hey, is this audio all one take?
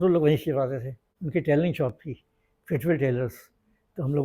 no; 1 cut; at 1.1 s

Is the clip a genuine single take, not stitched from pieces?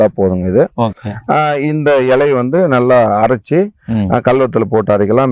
yes; 0 cuts

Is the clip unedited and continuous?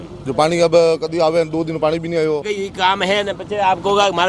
no; 1 cut; at 2.6 s

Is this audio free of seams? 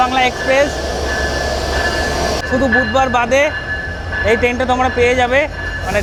yes; 0 cuts

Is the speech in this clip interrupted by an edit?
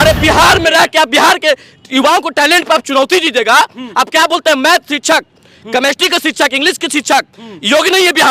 no; 0 cuts

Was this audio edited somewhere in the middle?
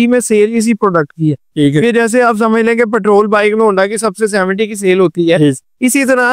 no; 0 cuts

